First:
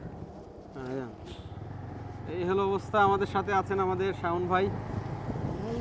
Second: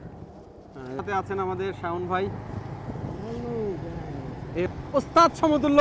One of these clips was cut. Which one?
second; 2 cuts; at 1.0 s, 4.7 s

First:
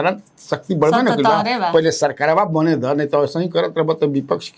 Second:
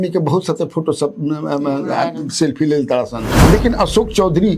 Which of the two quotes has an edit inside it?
second; 1 cut; at 3.4 s

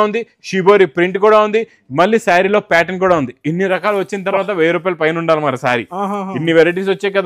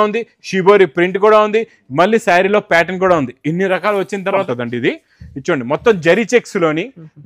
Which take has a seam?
second; 1 cut; at 4.4 s

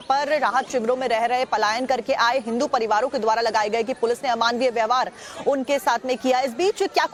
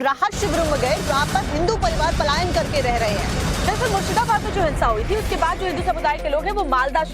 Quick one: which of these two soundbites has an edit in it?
second; 1 cut; at 4.1 s

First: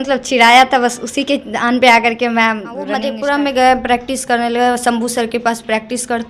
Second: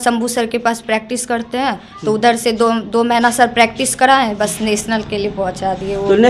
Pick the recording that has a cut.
first; 1 cut; at 3.0 s

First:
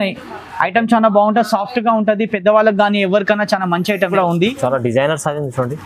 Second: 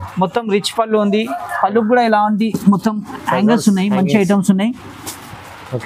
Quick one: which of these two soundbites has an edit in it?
first; 1 cut; at 4.1 s

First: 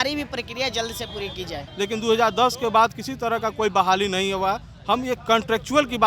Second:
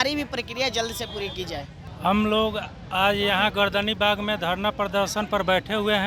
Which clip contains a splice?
first; 1 cut; at 1.7 s

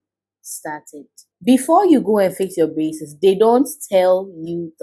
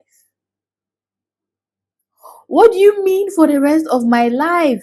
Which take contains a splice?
first; 1 cut; at 1.2 s

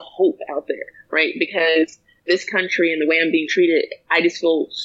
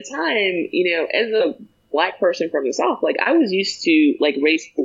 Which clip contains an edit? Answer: first; 1 cut; at 2.1 s

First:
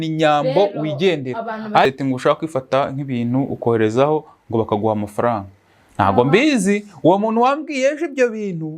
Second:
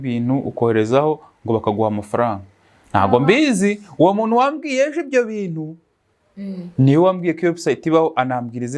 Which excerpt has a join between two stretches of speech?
first; 1 cut; at 1.9 s

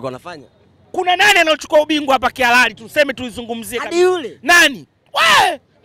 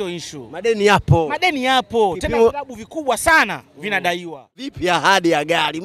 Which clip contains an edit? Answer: second; 1 cut; at 4.8 s

